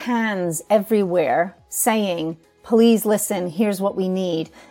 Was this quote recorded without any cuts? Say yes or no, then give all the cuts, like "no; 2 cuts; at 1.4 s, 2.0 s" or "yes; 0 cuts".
yes; 0 cuts